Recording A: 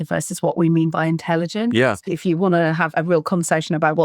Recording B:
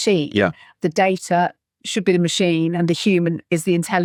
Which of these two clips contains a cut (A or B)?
A